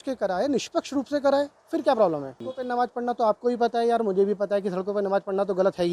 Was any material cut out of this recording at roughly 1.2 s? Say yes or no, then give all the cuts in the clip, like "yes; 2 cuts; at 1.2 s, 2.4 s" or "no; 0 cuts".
no; 1 cut; at 2.5 s